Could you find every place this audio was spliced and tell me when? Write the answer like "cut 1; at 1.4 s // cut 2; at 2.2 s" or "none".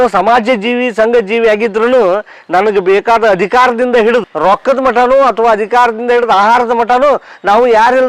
cut 1; at 4.3 s